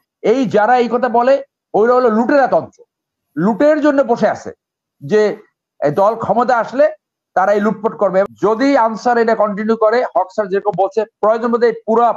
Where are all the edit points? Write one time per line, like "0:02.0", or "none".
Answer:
0:08.2